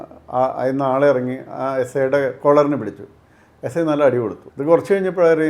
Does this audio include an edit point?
yes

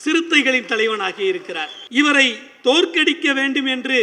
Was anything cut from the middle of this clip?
yes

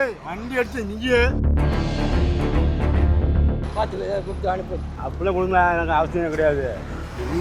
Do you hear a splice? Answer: no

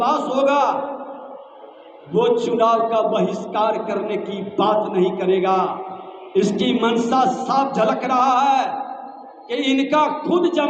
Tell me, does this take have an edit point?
no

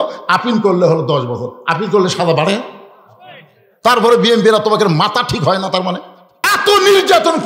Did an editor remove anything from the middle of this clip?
yes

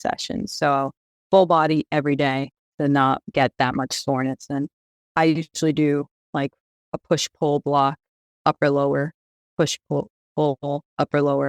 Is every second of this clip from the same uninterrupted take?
yes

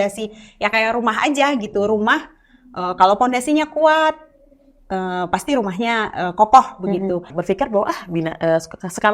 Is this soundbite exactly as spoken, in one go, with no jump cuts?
no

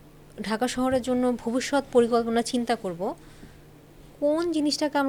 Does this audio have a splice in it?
no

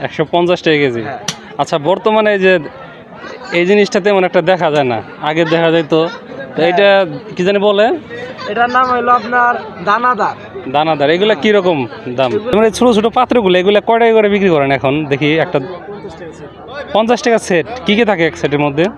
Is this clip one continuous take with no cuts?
no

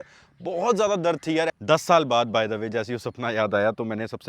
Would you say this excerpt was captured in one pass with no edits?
no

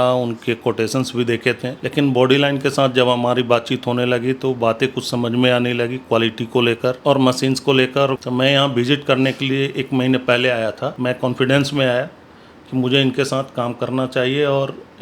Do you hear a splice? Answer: yes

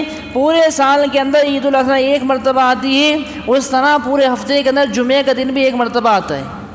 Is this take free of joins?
yes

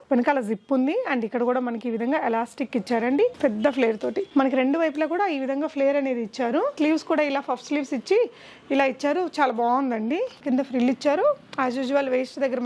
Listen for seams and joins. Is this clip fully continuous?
no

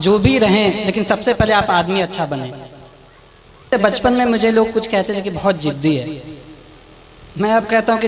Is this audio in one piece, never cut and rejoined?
no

